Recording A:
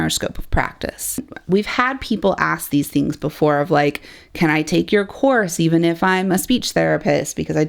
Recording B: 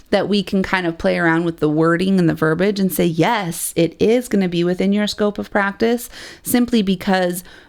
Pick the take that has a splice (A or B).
A